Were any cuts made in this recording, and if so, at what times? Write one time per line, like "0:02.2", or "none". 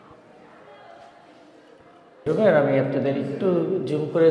0:02.2